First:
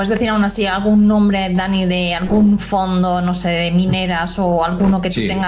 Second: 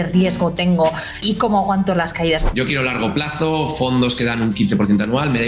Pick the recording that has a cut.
second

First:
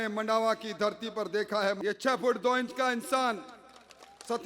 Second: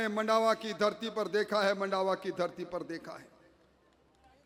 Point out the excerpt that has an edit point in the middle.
first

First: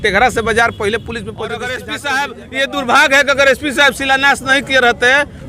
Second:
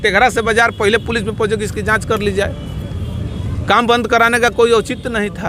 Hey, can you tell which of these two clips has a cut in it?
first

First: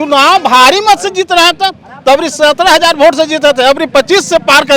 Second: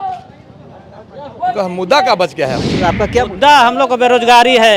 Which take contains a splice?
second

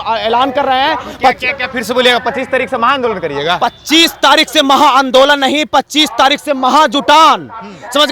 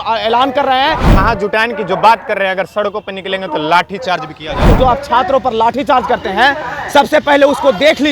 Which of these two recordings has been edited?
second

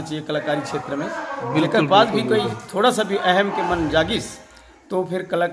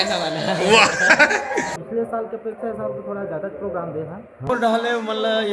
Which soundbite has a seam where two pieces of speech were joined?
second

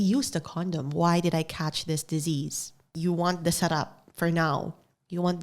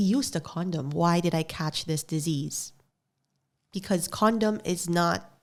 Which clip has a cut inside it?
first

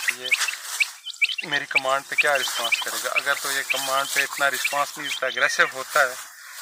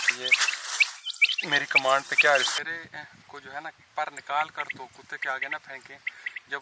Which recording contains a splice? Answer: second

